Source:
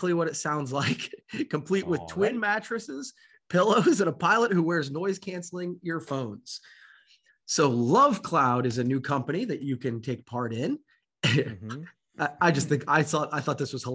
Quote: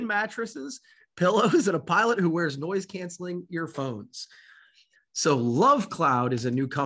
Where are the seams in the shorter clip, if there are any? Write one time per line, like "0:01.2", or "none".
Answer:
none